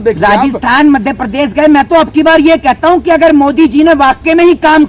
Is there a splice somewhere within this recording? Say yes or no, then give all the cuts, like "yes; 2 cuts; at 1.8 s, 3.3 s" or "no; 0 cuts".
no; 0 cuts